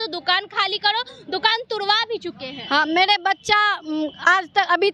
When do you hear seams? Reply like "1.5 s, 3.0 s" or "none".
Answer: none